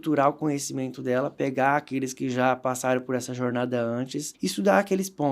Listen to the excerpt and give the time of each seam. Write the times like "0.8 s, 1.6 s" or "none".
4.2 s